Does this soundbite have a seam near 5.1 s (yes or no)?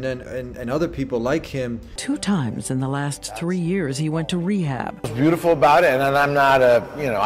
yes